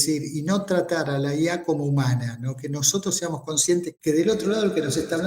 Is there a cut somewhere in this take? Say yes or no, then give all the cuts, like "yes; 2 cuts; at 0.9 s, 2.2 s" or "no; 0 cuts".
yes; 1 cut; at 3.9 s